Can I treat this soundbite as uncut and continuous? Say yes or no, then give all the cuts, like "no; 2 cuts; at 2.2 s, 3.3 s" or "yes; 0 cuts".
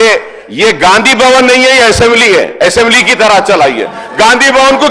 yes; 0 cuts